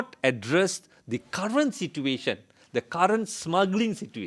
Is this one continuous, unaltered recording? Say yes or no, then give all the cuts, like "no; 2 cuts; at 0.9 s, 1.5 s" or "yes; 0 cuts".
yes; 0 cuts